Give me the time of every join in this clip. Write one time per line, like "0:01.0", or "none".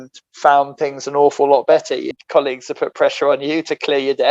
0:02.1